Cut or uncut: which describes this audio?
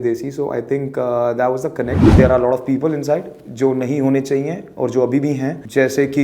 cut